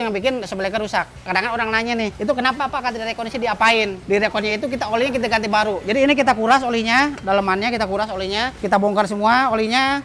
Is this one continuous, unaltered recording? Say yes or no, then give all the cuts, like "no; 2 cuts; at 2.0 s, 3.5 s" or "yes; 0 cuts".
no; 4 cuts; at 1.2 s, 2.1 s, 4.0 s, 8.6 s